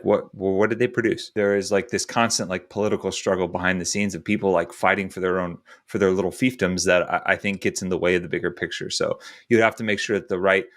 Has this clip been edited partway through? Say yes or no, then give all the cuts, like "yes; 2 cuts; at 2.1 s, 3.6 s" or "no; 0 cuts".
yes; 2 cuts; at 1.2 s, 8.8 s